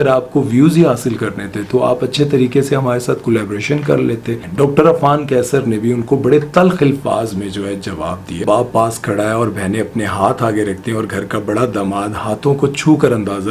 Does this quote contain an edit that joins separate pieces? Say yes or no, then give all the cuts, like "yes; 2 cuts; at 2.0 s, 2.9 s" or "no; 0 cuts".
yes; 2 cuts; at 4.4 s, 8.4 s